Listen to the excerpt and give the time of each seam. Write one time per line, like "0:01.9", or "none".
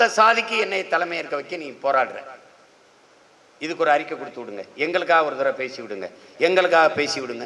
none